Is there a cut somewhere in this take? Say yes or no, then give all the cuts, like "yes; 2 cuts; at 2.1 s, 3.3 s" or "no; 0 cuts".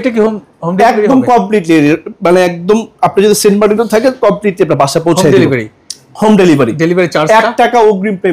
no; 0 cuts